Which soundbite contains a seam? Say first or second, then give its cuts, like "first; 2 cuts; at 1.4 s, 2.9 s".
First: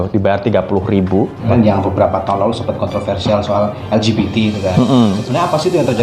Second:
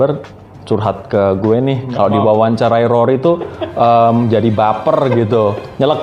first; 1 cut; at 1.5 s